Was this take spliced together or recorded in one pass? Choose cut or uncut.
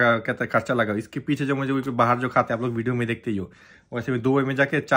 uncut